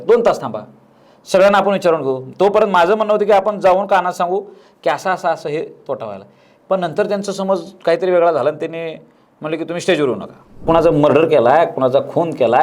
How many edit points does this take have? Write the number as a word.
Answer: one